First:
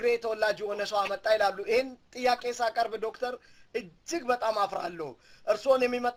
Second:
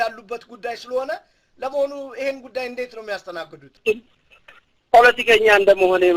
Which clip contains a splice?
second; 1 cut; at 3.8 s

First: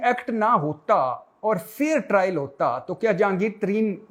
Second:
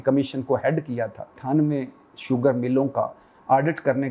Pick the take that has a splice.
second; 1 cut; at 1.4 s

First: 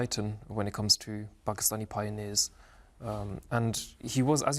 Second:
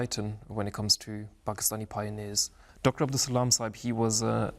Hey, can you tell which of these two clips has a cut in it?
second; 1 cut; at 2.6 s

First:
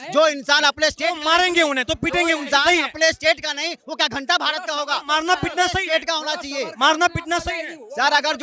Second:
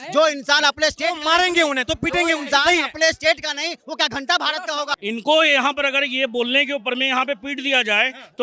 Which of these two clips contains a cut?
second; 1 cut; at 5.0 s

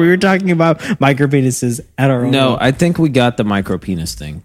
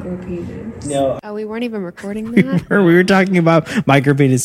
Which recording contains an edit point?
second; 1 cut; at 1.2 s

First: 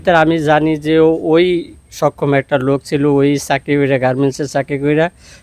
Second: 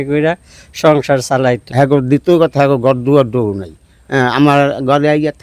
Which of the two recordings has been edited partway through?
second; 1 cut; at 1.6 s

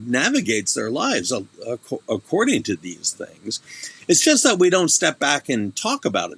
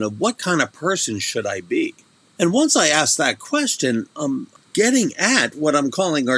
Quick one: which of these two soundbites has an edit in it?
second; 2 cuts; at 2.2 s, 4.5 s

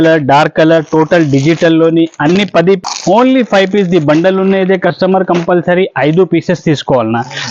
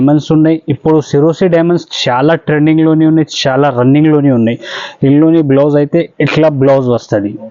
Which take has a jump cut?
first; 1 cut; at 2.8 s

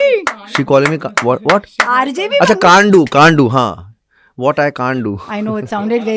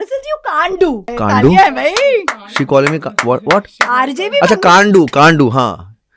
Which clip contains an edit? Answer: second; 1 cut; at 1.1 s

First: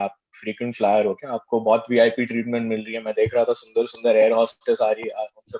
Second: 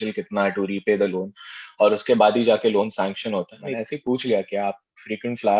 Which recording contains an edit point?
second; 1 cut; at 3.7 s

